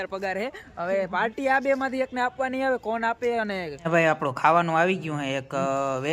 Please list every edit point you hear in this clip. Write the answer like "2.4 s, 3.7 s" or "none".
3.7 s

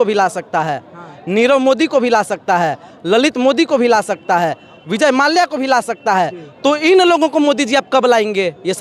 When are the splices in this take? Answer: none

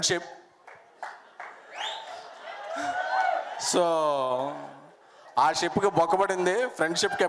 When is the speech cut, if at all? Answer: none

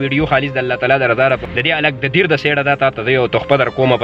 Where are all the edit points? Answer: 1.4 s

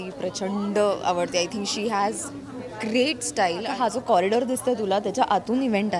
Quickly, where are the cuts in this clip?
3.7 s

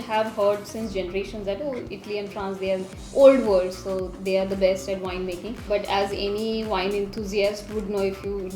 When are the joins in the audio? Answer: 5.6 s

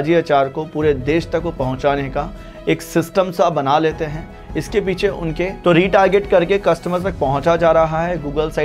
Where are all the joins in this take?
5.6 s

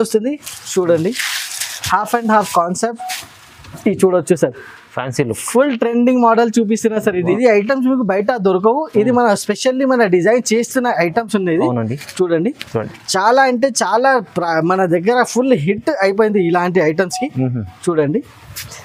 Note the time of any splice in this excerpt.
7.3 s

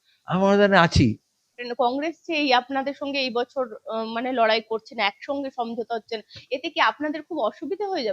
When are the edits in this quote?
1.6 s

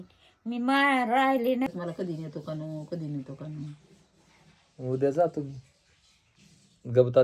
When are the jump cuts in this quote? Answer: 1.7 s

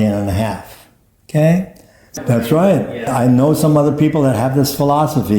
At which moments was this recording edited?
2.2 s, 3.1 s

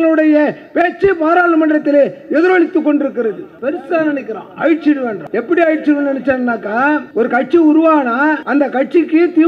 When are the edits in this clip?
3.5 s, 5.2 s, 7.1 s, 8.4 s

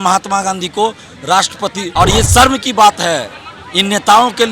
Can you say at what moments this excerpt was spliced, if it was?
1.8 s

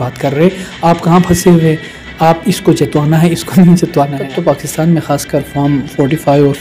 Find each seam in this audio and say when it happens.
4.2 s

